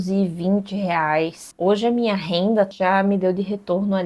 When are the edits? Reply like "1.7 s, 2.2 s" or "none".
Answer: 1.5 s, 2.7 s